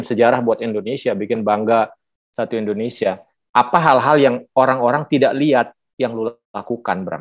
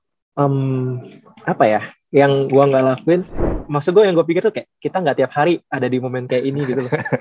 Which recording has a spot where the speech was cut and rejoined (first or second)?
second